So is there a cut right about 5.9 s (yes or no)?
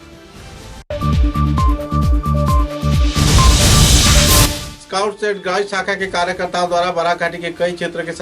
no